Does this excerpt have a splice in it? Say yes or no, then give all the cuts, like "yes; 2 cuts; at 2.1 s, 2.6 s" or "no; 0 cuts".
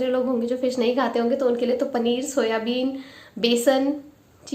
no; 0 cuts